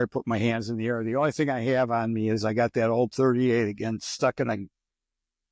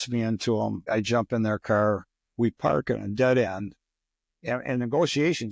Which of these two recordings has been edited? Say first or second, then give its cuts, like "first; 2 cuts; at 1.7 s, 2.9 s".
second; 2 cuts; at 0.8 s, 2.1 s